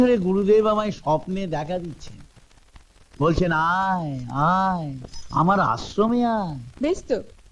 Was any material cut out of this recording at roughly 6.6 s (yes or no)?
no